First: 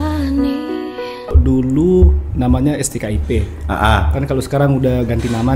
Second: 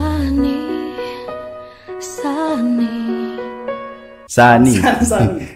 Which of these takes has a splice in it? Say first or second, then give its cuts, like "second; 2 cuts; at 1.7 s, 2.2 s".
first; 1 cut; at 1.4 s